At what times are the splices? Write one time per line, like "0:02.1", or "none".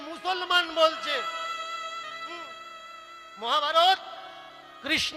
none